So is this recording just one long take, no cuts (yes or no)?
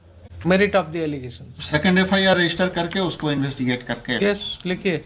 yes